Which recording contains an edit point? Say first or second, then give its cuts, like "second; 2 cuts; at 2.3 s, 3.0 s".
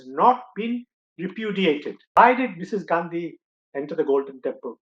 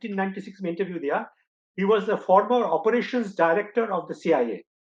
first; 1 cut; at 2.2 s